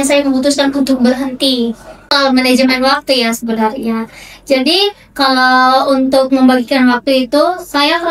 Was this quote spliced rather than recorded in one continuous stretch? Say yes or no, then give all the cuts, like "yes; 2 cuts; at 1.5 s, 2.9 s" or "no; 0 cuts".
yes; 1 cut; at 2.2 s